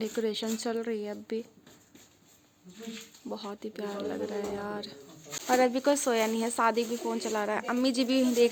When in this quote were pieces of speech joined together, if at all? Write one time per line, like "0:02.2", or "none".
none